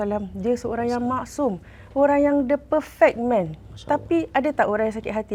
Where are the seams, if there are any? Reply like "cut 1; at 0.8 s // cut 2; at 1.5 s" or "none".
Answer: none

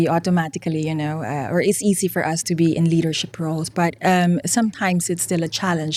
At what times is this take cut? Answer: none

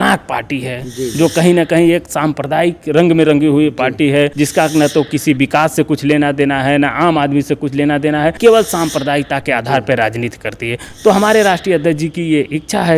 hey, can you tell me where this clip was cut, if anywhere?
cut 1; at 4.3 s // cut 2; at 8.4 s

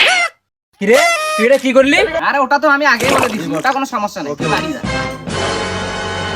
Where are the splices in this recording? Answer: cut 1; at 2.2 s

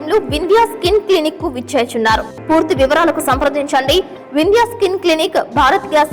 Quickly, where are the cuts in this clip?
cut 1; at 2.3 s

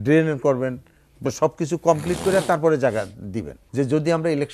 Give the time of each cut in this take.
cut 1; at 3.6 s

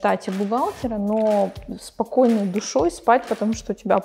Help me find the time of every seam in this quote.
none

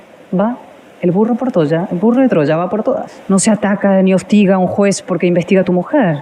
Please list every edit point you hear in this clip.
cut 1; at 3.1 s

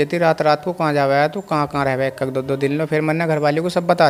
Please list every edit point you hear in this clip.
none

